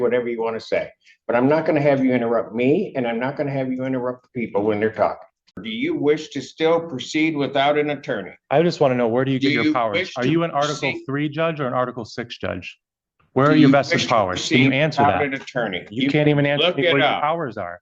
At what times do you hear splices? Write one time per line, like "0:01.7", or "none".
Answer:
0:05.6